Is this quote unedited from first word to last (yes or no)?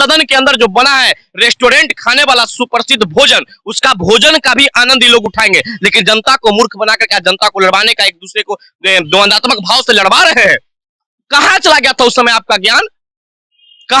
yes